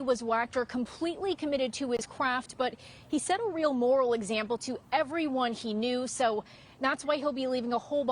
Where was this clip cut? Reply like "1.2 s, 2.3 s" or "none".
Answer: 5.5 s